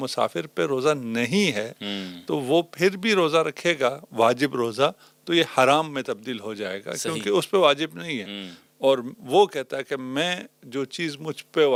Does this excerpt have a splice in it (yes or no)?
no